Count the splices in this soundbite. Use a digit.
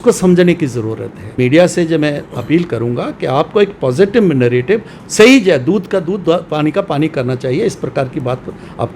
1